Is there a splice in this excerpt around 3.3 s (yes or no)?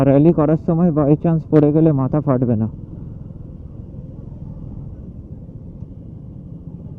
no